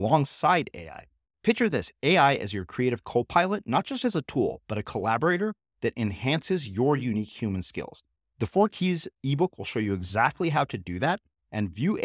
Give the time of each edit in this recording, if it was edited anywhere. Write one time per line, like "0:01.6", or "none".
none